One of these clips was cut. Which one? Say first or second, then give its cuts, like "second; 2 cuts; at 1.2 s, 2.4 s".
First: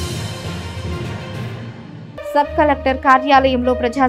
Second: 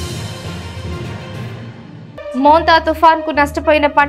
second; 1 cut; at 2.3 s